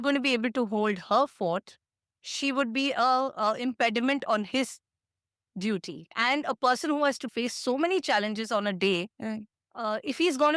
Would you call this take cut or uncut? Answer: cut